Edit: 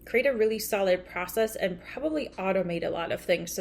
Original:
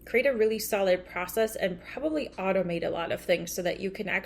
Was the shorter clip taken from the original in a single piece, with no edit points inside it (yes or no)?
yes